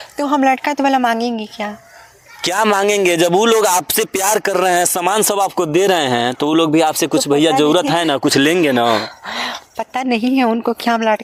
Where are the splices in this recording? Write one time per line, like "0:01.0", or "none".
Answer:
none